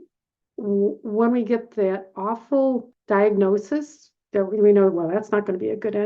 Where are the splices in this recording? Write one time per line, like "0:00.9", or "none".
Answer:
0:02.9